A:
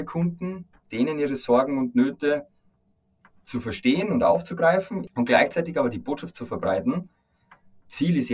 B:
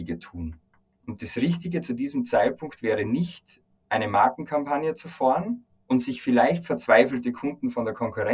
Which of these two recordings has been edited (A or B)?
A